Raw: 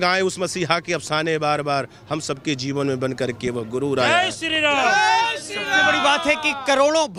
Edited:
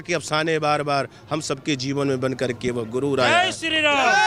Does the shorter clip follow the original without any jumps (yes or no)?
yes